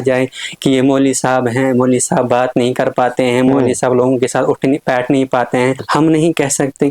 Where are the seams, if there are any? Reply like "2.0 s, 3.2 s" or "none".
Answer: 5.8 s